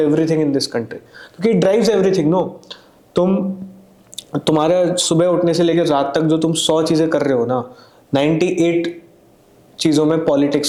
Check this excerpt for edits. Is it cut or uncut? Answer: uncut